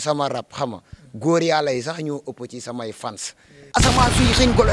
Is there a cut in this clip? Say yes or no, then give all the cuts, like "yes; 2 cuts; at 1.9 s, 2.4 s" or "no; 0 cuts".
yes; 1 cut; at 3.4 s